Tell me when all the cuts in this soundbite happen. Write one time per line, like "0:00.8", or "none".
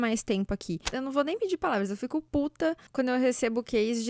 0:00.9
0:02.4